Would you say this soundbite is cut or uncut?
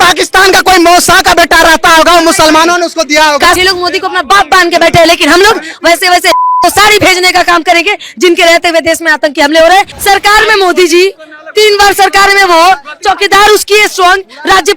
cut